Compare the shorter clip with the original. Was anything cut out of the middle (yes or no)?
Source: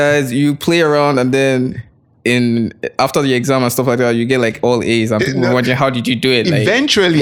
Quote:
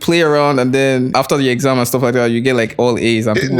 yes